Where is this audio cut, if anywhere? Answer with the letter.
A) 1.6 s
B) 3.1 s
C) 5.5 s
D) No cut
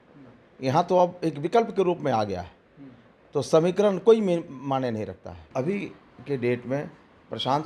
C